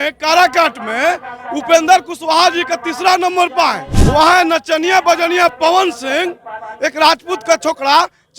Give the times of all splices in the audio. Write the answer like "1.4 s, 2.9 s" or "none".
3.9 s

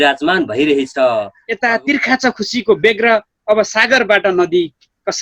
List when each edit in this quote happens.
1.4 s

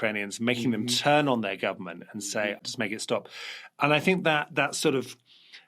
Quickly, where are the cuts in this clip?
2.6 s

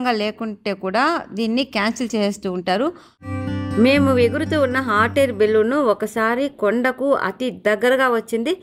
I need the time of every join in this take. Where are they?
3.2 s

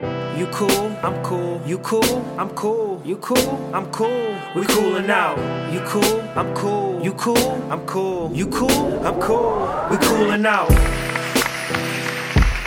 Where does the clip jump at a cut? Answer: none

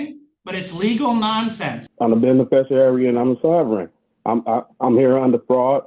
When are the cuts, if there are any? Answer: 1.8 s

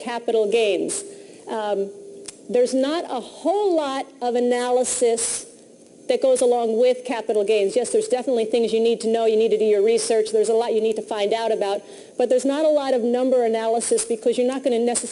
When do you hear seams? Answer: 8.2 s

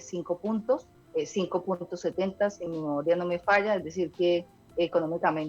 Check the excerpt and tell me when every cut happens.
1.0 s, 2.6 s, 4.6 s

